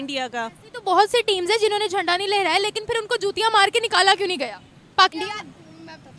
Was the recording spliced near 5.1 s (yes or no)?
yes